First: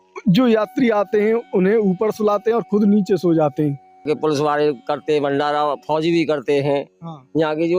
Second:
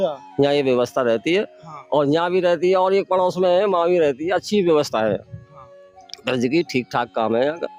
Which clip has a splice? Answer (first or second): first